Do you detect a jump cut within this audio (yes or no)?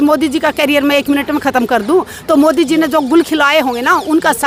no